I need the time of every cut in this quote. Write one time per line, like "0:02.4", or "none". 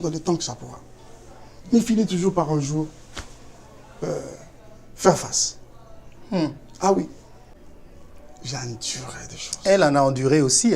0:07.4